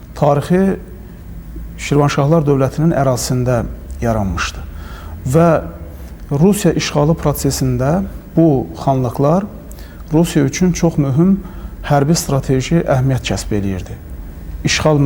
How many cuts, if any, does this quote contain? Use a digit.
0